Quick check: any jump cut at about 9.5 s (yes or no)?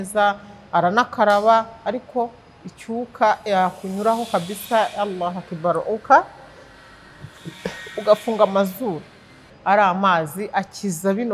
yes